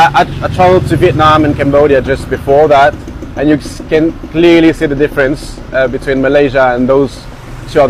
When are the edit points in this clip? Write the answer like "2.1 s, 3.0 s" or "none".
none